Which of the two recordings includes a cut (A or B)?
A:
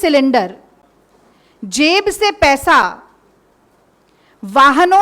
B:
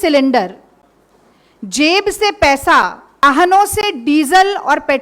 B